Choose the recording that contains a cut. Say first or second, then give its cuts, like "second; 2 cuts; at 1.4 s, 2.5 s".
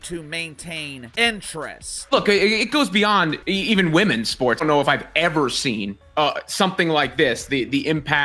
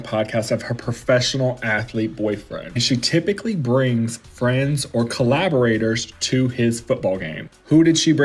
first; 4 cuts; at 1.1 s, 1.9 s, 3.4 s, 4.6 s